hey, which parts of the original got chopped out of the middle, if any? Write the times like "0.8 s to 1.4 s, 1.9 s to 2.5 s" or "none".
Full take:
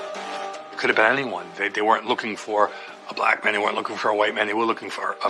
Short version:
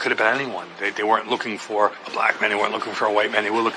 2.8 s to 3.1 s